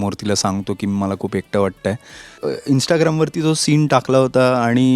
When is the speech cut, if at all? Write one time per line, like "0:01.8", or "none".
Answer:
0:02.4